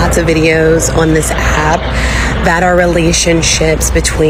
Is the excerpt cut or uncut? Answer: uncut